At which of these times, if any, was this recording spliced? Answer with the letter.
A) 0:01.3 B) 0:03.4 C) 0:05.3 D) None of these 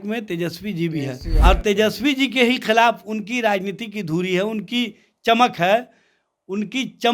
A